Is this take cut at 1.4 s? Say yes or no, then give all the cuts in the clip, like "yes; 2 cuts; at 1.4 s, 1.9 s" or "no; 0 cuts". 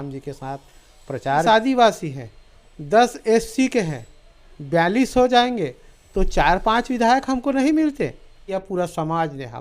yes; 2 cuts; at 1.4 s, 8.5 s